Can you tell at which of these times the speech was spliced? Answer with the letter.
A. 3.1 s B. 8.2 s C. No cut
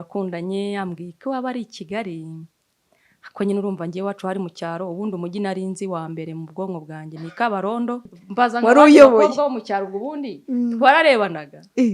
B